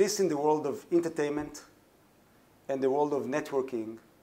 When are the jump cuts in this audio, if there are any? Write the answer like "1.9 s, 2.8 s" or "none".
none